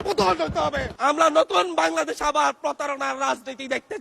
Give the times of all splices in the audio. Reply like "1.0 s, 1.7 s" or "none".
0.9 s

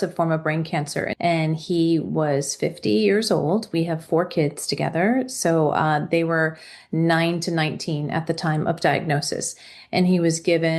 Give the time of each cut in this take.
1.1 s

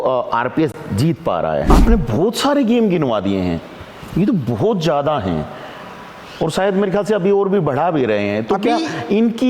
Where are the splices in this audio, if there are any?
1.7 s

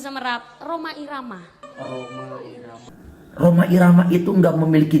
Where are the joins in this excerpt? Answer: 2.9 s

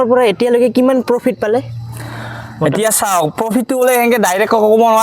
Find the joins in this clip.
none

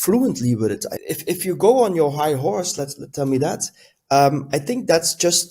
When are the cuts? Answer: 0.9 s

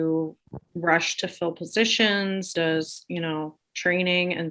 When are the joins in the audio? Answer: 2.5 s

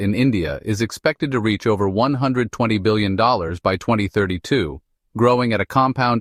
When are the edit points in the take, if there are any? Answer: none

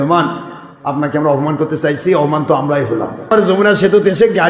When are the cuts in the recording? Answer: 3.3 s

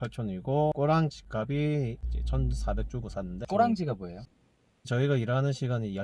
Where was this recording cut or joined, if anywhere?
3.4 s, 4.4 s

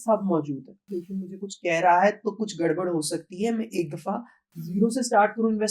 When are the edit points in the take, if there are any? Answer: 1.0 s

